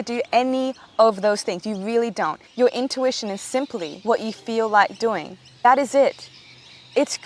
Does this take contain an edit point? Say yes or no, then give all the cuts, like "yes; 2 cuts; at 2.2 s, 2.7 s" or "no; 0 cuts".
yes; 3 cuts; at 2.4 s, 3.9 s, 5.6 s